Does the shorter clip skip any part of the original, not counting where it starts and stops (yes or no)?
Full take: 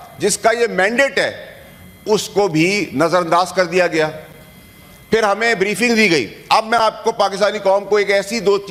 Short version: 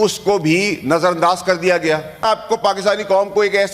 yes